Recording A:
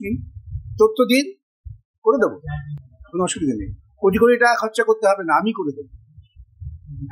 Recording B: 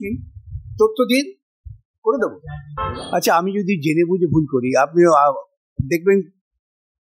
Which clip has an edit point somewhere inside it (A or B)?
B